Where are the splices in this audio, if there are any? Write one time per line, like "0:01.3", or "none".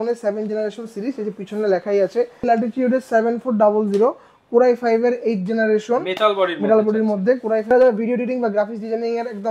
0:02.4
0:07.7